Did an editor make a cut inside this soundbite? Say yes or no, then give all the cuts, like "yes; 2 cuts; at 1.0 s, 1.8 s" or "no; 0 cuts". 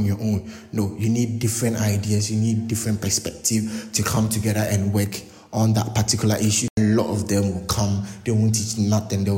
yes; 1 cut; at 6.8 s